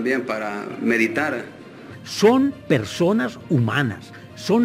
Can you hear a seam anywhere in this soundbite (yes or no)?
yes